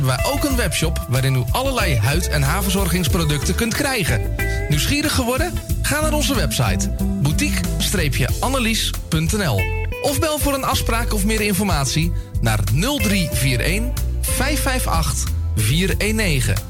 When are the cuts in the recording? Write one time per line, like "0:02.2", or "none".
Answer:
none